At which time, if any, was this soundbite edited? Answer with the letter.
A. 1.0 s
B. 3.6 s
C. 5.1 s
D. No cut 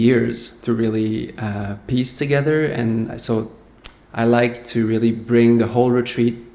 D